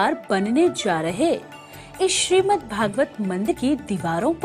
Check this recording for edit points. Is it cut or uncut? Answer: cut